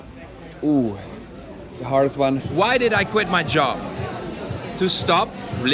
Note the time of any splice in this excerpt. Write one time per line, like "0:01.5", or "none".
0:02.5